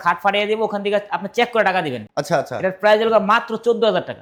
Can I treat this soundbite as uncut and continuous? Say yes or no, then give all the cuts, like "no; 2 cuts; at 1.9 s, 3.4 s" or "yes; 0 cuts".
yes; 0 cuts